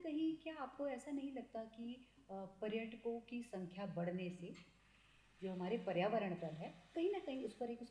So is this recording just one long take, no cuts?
yes; 0 cuts

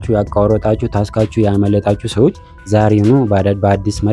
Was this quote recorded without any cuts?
yes; 0 cuts

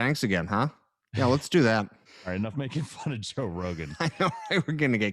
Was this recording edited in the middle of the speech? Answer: yes; 1 cut; at 2.1 s

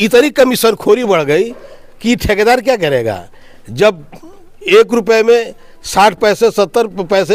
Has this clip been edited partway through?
no; 0 cuts

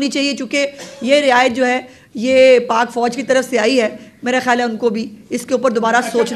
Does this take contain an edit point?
no; 0 cuts

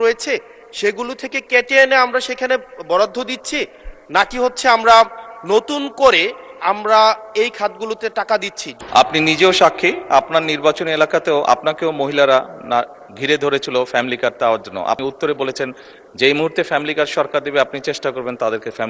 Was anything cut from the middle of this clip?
yes; 2 cuts; at 8.6 s, 15.0 s

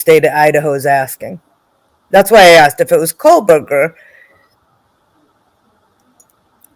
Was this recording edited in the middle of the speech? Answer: no; 0 cuts

